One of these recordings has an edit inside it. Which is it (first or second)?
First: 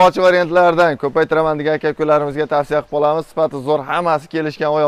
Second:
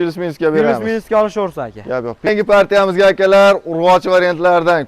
second